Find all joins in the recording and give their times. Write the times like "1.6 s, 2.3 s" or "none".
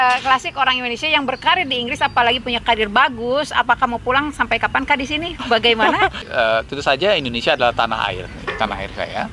6.2 s